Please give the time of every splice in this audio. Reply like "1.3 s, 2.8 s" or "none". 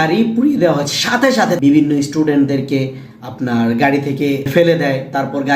1.6 s, 4.5 s